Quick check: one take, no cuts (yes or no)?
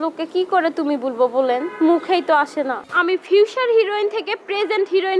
no